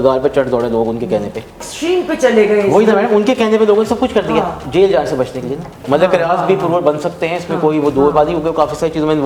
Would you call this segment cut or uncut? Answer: cut